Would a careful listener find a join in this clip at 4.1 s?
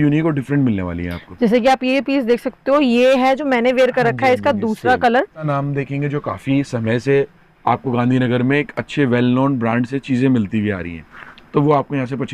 no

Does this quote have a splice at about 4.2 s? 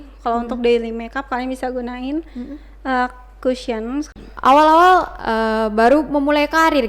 yes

